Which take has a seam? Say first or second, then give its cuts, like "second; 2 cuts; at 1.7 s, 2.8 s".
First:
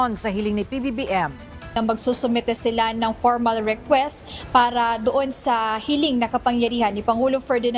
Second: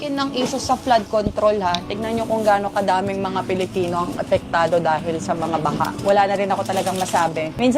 first; 1 cut; at 1.7 s